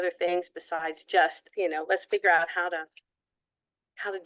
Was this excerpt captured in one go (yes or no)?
no